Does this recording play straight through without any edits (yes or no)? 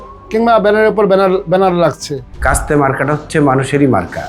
no